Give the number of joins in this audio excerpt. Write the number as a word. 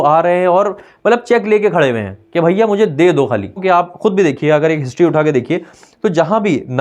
one